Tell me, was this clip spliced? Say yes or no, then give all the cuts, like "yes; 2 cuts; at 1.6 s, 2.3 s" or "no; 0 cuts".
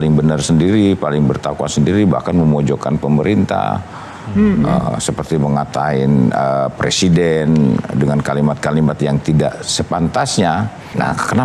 no; 0 cuts